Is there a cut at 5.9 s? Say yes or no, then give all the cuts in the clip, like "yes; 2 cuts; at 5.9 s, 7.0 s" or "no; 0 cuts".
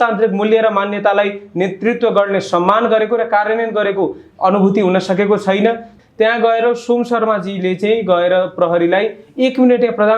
yes; 1 cut; at 5.9 s